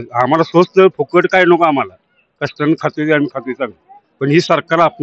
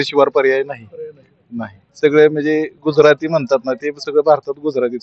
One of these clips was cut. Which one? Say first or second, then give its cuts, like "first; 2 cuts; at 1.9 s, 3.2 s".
second; 1 cut; at 1.8 s